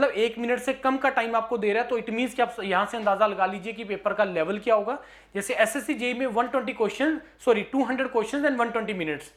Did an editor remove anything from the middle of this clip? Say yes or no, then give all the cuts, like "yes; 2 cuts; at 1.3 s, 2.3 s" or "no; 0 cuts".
no; 0 cuts